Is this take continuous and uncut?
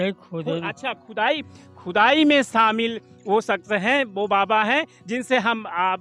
yes; 0 cuts

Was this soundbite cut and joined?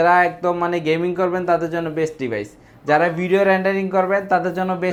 no; 0 cuts

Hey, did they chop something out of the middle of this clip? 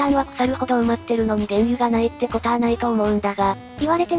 no; 0 cuts

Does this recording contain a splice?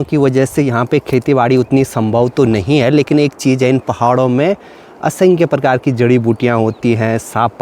no; 0 cuts

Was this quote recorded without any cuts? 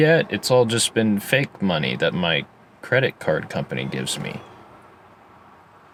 yes; 0 cuts

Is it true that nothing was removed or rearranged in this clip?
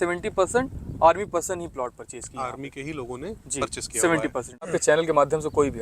no; 1 cut; at 4.7 s

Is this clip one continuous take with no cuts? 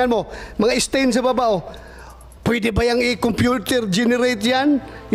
yes; 0 cuts

